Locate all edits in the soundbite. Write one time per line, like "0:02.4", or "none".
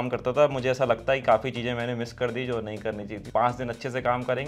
0:03.2